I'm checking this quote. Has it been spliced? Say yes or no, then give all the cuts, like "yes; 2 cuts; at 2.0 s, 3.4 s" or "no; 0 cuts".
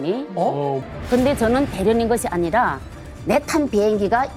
yes; 1 cut; at 0.9 s